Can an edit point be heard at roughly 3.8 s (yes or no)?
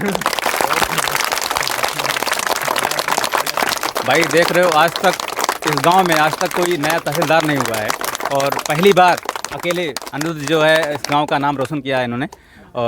yes